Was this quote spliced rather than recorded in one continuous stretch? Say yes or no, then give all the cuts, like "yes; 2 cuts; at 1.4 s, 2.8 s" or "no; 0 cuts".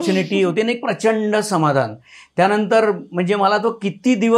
no; 0 cuts